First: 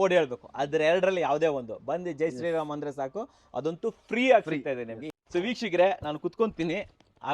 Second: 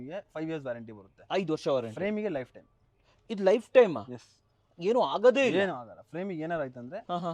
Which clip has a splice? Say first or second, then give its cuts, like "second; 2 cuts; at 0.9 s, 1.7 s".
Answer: first; 1 cut; at 5.0 s